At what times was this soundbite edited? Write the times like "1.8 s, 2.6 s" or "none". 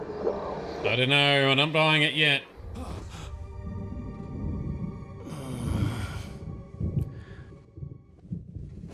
none